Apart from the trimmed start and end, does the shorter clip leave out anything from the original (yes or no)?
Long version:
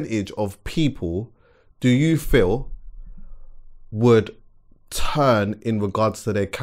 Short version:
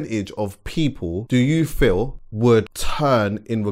yes